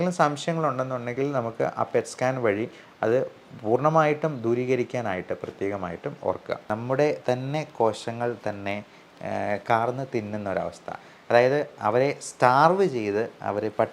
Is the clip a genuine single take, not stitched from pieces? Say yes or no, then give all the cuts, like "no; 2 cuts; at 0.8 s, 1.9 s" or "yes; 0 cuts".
no; 1 cut; at 6.6 s